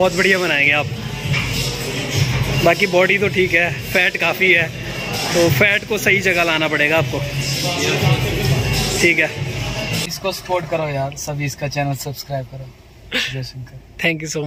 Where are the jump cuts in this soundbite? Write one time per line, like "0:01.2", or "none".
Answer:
0:10.0

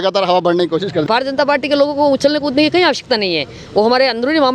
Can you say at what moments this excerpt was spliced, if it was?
0:01.0

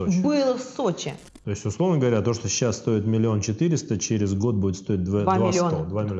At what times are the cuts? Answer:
0:01.1

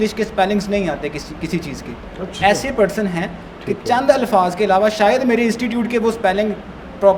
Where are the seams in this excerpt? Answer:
none

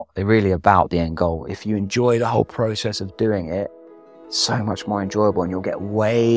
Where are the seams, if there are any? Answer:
none

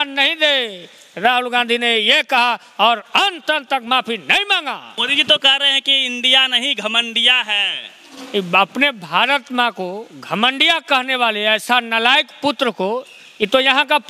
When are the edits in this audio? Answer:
0:04.9

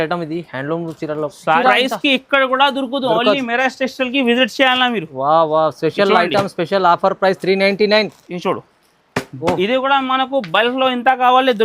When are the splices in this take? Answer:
0:01.6

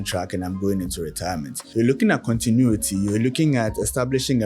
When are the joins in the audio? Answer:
0:01.6

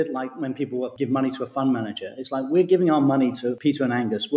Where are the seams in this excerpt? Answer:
0:00.9
0:03.5

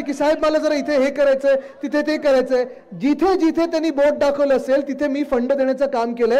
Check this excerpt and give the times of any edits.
none

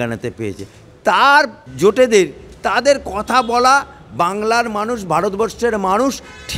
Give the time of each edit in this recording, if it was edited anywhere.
0:01.6

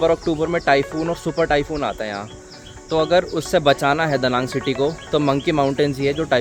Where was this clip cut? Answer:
none

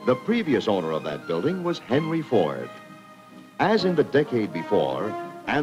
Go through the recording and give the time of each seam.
none

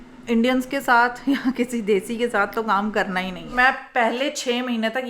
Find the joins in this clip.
0:03.5

